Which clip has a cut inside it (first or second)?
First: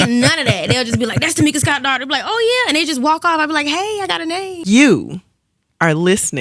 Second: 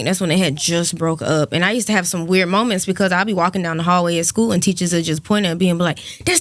first